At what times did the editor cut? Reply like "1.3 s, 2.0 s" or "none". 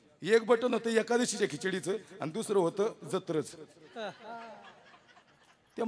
none